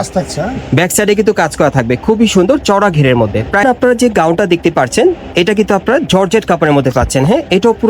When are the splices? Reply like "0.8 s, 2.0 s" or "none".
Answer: 3.6 s